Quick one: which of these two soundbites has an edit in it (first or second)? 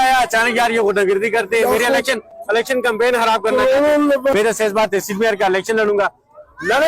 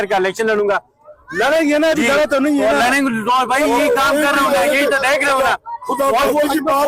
first